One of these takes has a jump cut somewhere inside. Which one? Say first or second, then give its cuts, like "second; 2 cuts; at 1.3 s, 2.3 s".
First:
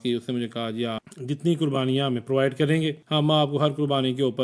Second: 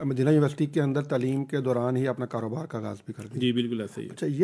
first; 2 cuts; at 1.0 s, 3.0 s